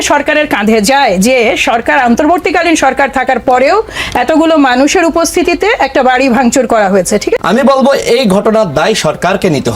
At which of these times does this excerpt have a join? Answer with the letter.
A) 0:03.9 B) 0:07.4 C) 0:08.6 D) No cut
B